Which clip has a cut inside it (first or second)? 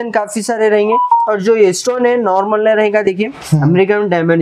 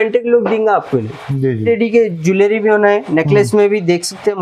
second